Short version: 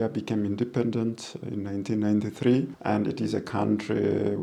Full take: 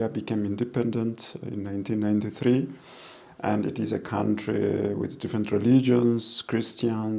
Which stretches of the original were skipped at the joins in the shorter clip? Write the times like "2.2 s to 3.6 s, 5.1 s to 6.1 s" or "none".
2.7 s to 3.3 s